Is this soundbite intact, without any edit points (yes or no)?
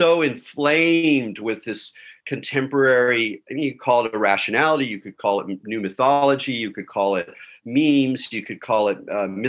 yes